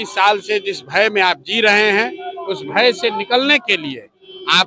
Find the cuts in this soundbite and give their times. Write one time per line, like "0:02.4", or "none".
none